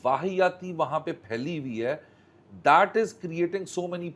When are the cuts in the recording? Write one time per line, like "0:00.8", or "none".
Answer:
none

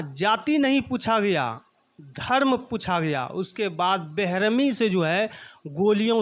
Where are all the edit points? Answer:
none

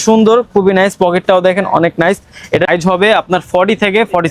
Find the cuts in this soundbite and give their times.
0:02.7

